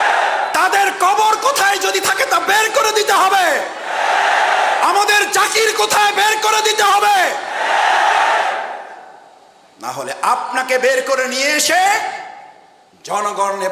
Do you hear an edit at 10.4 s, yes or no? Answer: no